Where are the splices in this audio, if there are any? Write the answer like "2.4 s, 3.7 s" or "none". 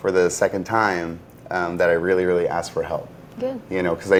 none